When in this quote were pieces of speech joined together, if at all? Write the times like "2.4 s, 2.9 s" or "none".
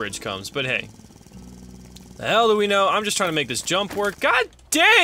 none